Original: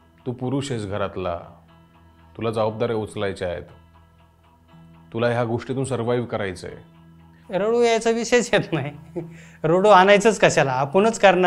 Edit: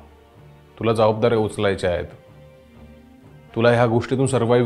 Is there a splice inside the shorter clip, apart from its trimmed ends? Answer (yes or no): no